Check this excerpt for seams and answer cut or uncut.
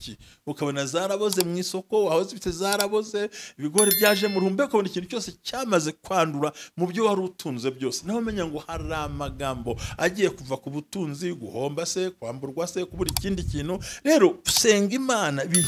uncut